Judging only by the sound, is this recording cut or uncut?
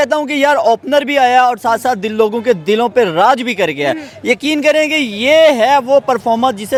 uncut